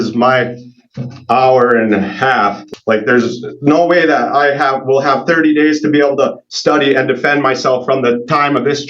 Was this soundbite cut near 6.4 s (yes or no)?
no